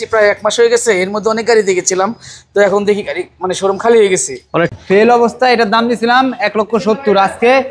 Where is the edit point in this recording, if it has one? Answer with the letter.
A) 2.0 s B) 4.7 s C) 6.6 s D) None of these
B